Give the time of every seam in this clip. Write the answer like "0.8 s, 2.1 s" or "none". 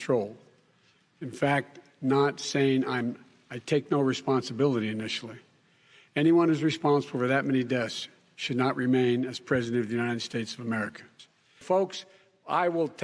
none